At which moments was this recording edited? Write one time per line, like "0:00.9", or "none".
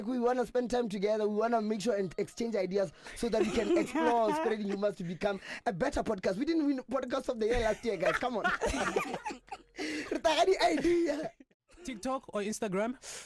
0:11.4

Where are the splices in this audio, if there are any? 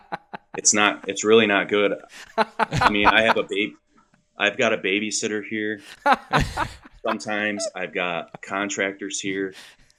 none

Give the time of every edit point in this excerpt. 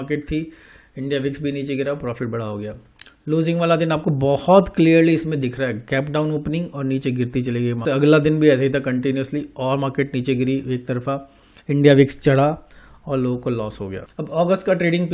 0:14.0

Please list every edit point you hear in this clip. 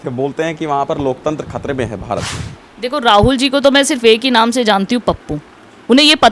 none

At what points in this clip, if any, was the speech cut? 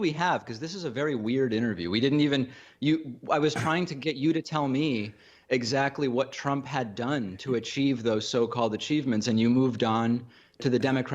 0:02.6

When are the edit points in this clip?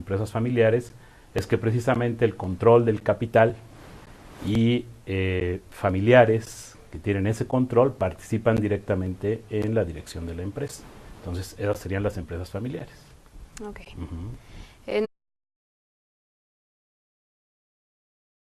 none

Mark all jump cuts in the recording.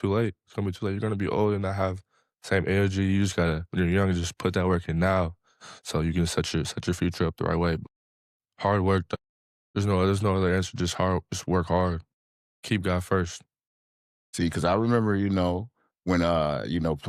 none

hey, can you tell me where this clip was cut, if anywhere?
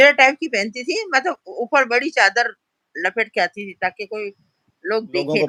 none

